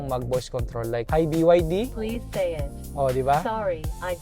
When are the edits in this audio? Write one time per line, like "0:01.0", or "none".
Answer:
0:01.1
0:02.0